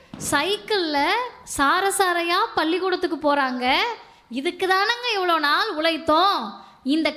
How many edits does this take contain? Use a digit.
0